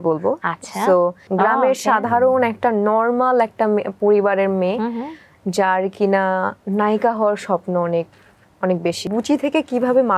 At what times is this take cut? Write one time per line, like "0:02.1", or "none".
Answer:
0:01.2
0:09.1